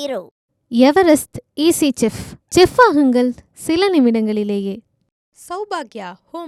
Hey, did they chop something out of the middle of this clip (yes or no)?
no